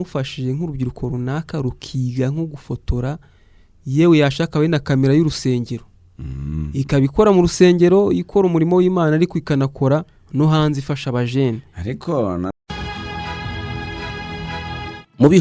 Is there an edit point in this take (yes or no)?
yes